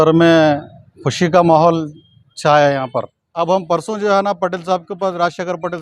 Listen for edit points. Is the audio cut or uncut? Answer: cut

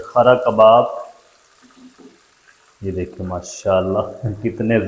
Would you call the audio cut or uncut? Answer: uncut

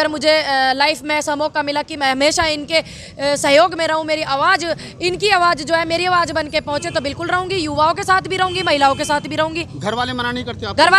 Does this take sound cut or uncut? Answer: uncut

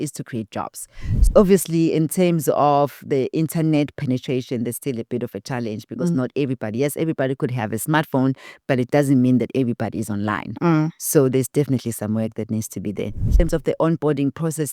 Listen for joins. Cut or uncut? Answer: cut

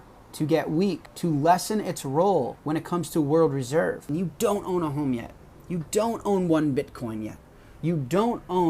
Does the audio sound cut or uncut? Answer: cut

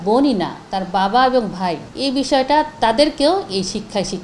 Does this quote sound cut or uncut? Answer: cut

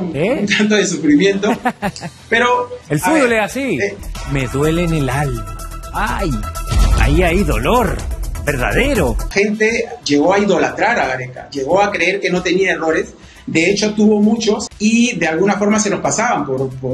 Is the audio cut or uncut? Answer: cut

